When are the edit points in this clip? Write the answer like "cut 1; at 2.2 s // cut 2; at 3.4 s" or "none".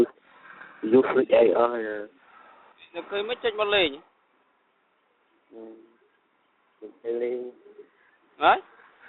none